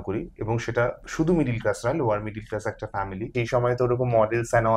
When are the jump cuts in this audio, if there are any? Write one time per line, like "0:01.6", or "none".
0:01.0
0:03.3